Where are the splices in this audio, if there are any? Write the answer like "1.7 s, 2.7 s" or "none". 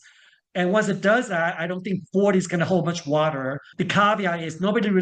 3.6 s